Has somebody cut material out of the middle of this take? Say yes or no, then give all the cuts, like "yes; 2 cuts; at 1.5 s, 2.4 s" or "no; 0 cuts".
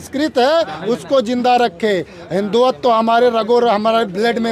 no; 0 cuts